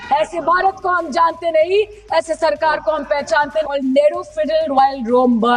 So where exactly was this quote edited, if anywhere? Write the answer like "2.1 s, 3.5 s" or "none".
3.7 s